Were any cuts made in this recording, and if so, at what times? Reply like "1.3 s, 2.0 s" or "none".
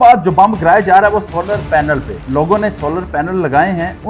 none